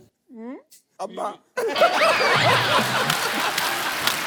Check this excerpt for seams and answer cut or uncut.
uncut